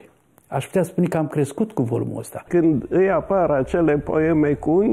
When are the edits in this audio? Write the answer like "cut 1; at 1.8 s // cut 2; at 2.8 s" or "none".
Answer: cut 1; at 2.5 s